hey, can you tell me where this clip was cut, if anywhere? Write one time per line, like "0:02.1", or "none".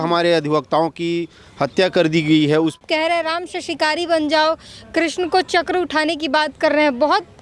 0:02.8